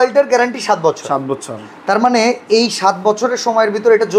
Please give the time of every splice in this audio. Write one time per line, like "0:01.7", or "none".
none